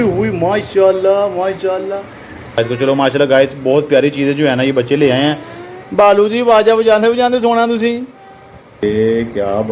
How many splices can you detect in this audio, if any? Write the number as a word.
two